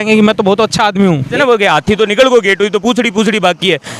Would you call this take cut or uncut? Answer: cut